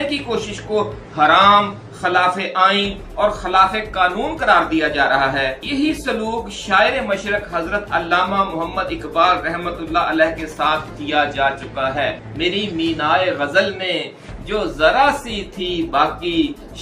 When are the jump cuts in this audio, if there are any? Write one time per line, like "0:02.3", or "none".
0:12.3